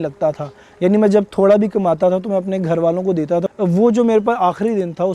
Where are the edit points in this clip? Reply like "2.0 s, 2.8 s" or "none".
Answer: 3.5 s